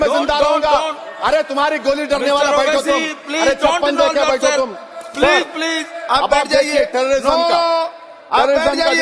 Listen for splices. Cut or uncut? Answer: uncut